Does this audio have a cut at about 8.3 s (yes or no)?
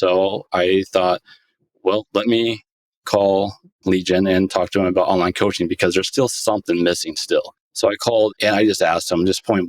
yes